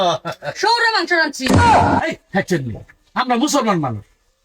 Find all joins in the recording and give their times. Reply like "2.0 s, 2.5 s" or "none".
1.4 s, 2.2 s

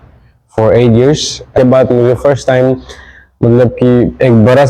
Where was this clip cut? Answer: 1.5 s

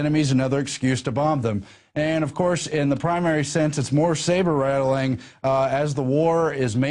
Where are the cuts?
5.9 s

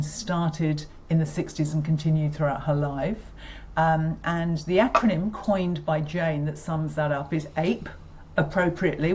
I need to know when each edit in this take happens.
none

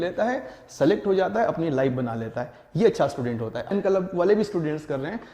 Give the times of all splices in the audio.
3.7 s

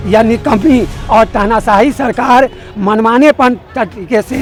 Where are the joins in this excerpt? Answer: none

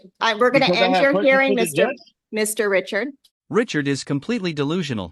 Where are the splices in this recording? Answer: none

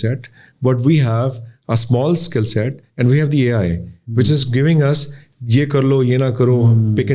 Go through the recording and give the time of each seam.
none

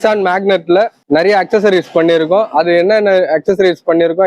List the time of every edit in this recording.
1.0 s

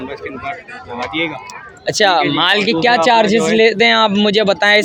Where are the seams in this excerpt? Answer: none

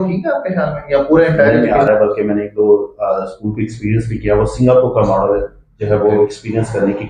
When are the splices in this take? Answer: 1.6 s

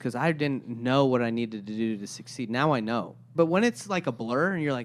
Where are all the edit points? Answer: 3.3 s

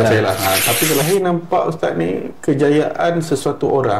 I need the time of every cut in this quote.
1.0 s

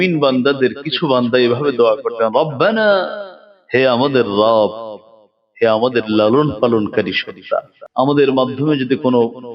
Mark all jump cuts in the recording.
7.8 s

